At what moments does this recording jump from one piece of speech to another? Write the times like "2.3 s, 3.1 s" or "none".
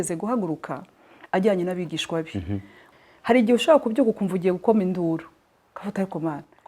2.8 s

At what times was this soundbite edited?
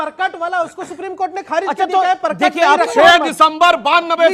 2.9 s

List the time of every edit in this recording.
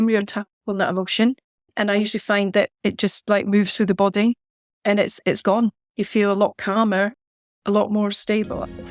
5.8 s

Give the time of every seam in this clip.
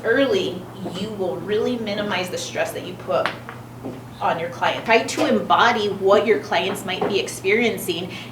4.8 s

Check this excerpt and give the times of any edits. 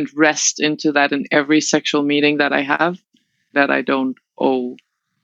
3.5 s

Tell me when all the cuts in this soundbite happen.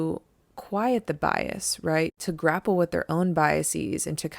2.2 s

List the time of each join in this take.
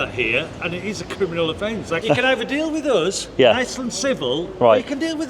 2.0 s

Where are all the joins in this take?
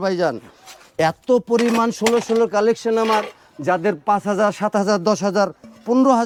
none

